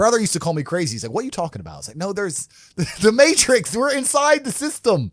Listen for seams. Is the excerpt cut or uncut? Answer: uncut